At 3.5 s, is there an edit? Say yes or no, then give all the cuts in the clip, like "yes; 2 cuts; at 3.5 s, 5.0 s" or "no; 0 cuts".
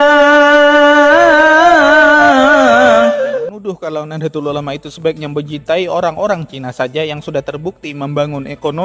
yes; 1 cut; at 3.5 s